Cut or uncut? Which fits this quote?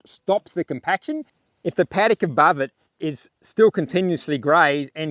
cut